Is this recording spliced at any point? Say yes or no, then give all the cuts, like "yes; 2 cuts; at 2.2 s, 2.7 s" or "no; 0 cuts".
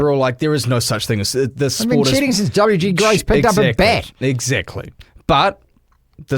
no; 0 cuts